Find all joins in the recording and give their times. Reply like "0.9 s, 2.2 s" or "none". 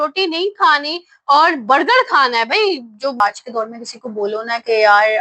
3.2 s